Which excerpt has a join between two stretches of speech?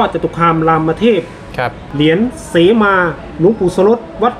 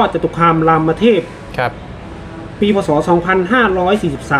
first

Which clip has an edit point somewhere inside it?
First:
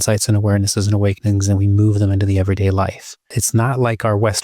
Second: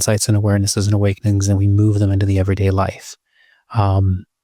first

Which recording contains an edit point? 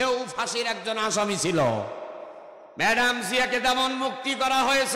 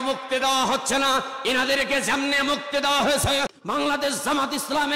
second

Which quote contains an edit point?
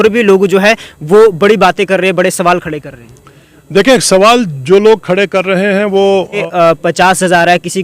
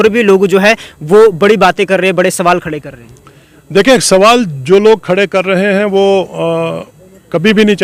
first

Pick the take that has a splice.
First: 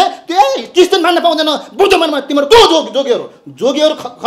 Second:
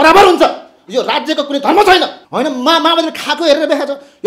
second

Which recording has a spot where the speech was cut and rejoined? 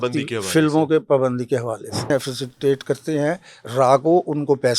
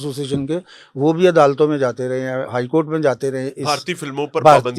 first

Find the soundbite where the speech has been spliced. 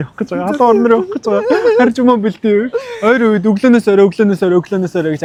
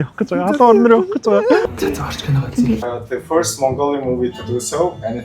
second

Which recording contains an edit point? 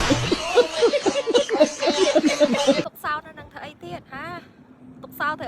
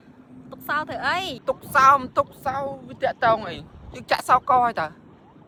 first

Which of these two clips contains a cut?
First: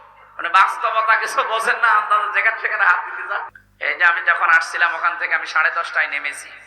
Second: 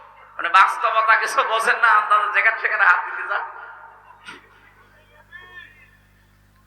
first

